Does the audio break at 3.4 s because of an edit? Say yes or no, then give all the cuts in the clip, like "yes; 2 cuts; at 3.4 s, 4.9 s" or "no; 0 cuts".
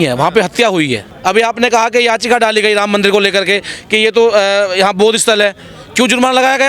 no; 1 cut; at 1.1 s